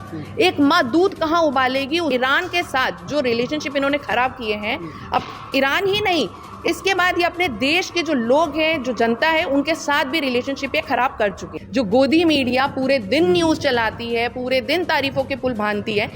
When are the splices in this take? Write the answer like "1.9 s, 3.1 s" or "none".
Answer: 2.1 s, 11.6 s